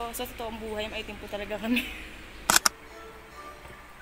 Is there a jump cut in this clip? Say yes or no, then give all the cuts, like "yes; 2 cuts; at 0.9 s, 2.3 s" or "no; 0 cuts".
yes; 1 cut; at 2.6 s